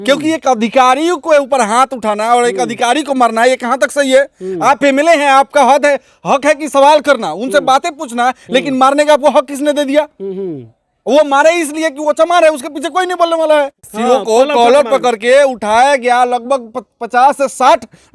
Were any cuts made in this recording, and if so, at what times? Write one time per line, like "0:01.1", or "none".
0:13.8

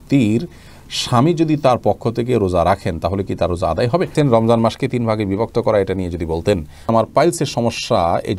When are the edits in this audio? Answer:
0:04.1
0:06.7

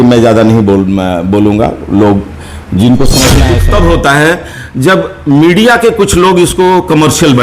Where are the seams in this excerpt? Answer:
0:03.4

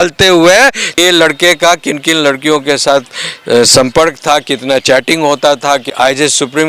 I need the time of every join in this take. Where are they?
0:01.0
0:05.9

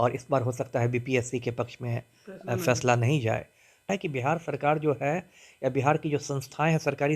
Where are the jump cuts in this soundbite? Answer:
0:03.9

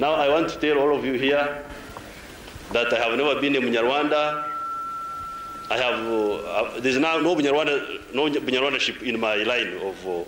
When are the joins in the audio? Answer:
none

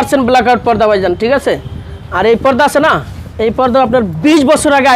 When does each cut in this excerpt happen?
none

